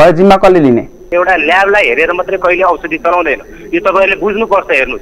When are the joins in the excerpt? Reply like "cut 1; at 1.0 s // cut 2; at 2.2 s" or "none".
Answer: cut 1; at 1.1 s